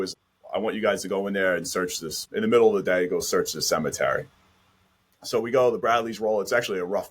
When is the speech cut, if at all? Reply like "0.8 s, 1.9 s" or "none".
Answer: none

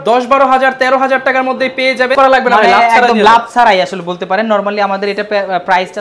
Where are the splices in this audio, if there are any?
2.1 s

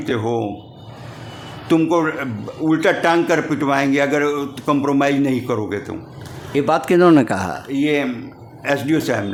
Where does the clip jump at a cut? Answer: none

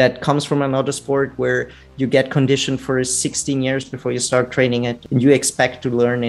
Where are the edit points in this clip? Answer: 5.0 s

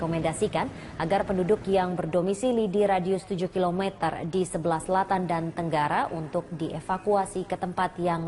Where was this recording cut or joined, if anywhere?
6.2 s

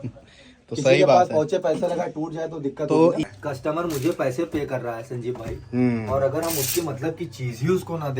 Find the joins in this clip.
3.2 s

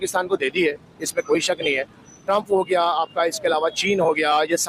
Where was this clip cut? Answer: none

